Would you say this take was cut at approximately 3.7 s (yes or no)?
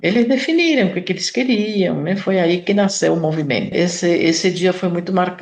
yes